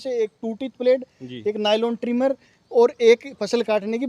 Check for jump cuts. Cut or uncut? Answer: uncut